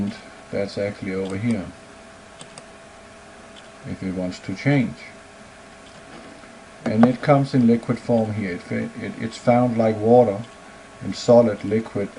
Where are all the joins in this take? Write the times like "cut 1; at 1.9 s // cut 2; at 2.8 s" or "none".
cut 1; at 6.2 s